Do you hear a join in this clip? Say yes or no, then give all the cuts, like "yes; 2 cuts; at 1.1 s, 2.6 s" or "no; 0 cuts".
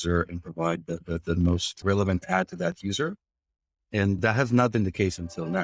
yes; 2 cuts; at 1.7 s, 4.2 s